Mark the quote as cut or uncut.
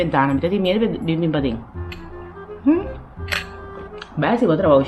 uncut